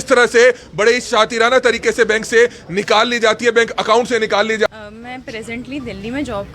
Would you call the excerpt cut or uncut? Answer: cut